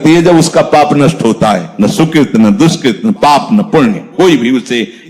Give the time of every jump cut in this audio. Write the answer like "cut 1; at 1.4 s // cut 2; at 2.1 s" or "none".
cut 1; at 1.7 s

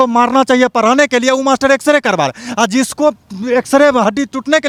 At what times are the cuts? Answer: none

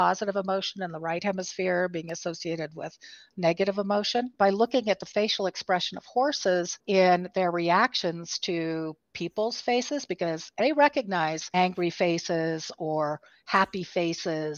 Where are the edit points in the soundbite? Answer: cut 1; at 4.3 s // cut 2; at 6.8 s // cut 3; at 10.5 s // cut 4; at 11.4 s

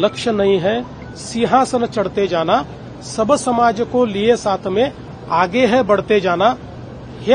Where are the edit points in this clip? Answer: none

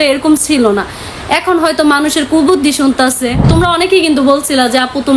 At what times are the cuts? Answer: cut 1; at 3.5 s

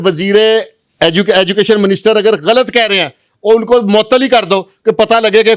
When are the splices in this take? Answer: none

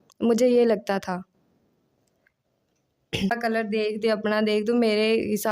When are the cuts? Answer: cut 1; at 3.3 s

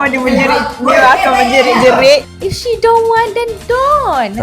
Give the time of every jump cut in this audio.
cut 1; at 2.3 s

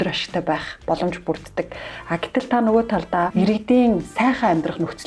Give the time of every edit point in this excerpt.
cut 1; at 3.3 s

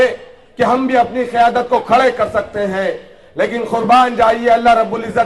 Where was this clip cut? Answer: none

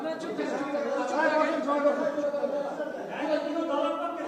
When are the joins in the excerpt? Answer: none

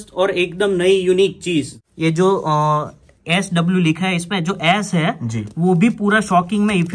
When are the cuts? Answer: cut 1; at 1.8 s

